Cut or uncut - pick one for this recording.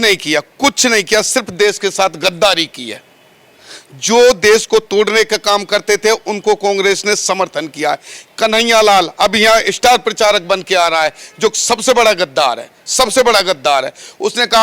uncut